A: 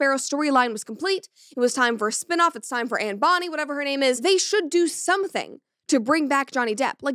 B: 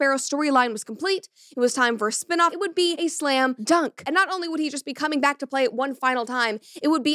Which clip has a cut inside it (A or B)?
B